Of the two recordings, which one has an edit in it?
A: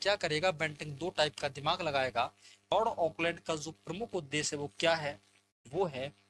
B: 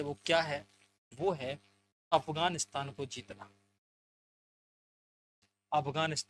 A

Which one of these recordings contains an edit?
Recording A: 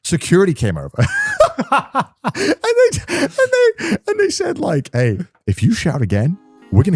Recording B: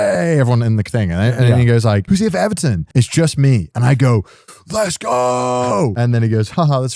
B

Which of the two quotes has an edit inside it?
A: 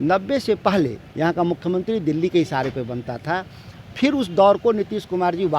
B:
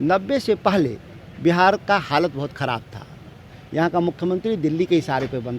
A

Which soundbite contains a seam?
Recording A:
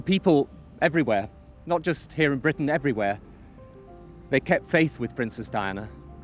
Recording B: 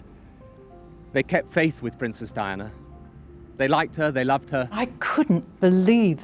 B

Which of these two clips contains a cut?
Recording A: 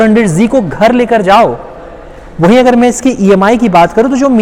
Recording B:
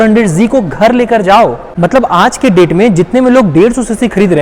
B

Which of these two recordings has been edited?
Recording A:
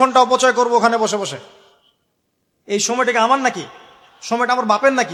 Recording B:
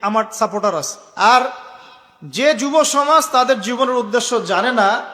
B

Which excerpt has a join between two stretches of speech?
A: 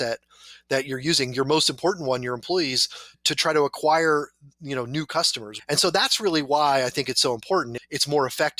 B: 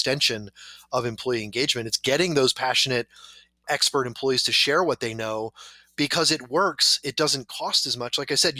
A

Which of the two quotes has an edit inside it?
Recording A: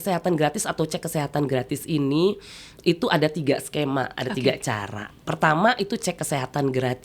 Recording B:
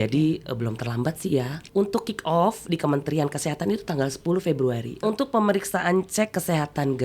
B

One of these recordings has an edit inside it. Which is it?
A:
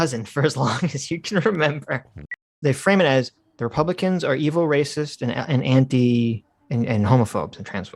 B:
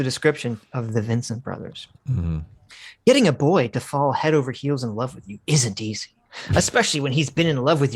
A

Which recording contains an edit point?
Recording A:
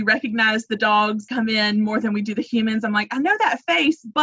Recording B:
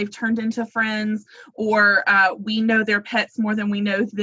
A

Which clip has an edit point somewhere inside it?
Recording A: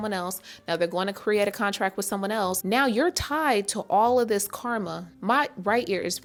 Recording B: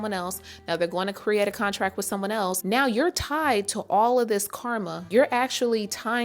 B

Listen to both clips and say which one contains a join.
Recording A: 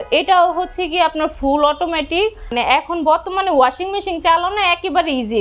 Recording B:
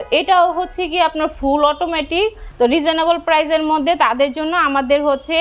B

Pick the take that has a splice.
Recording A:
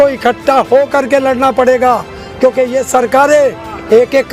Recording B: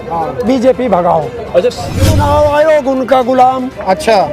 B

